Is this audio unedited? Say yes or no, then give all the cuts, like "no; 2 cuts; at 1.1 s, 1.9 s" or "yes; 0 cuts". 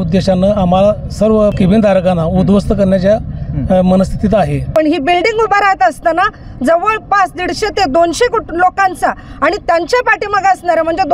no; 2 cuts; at 1.5 s, 4.6 s